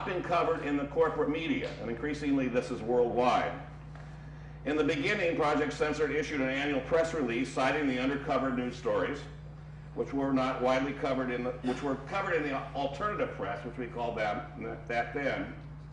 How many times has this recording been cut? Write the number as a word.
one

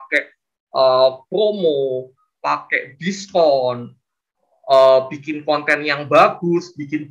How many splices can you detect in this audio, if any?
zero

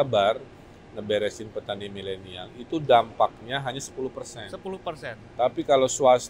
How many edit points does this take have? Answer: zero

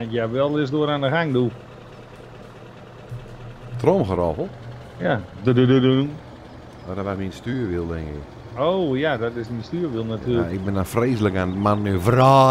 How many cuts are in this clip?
zero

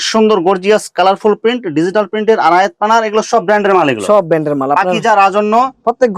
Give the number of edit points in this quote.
zero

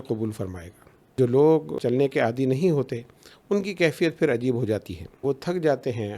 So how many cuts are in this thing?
three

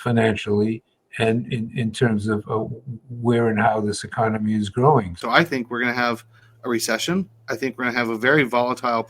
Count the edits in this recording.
one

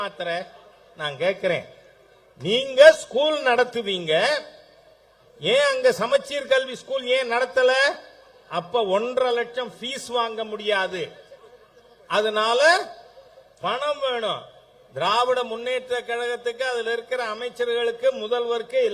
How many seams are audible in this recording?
zero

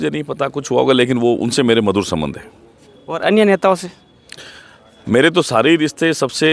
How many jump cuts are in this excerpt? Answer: zero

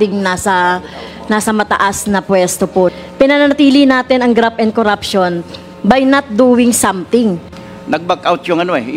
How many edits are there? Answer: two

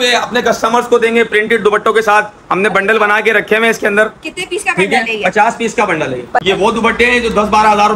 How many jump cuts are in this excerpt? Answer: one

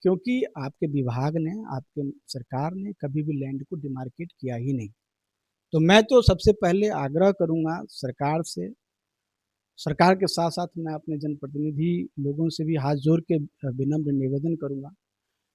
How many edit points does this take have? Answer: zero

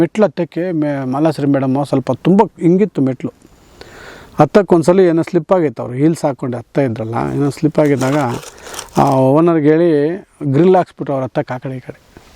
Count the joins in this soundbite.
zero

